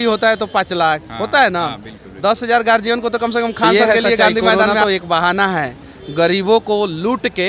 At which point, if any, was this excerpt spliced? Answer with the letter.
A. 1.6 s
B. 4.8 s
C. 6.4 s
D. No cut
B